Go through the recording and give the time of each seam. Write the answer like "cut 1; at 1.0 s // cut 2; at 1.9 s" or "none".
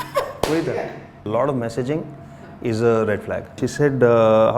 cut 1; at 1.2 s // cut 2; at 3.6 s